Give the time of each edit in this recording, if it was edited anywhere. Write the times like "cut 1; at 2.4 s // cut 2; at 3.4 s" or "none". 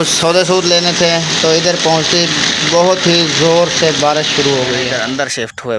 cut 1; at 4.9 s